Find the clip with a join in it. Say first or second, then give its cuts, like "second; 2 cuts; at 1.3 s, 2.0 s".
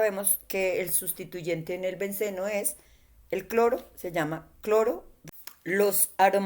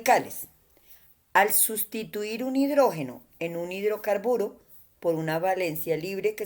first; 1 cut; at 5.1 s